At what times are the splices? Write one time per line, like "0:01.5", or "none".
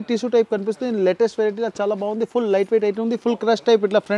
none